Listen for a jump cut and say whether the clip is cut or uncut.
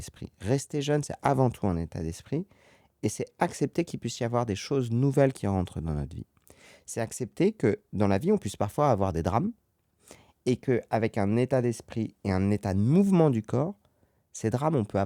uncut